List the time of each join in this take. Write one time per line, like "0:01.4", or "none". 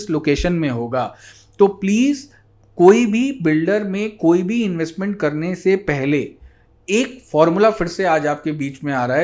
none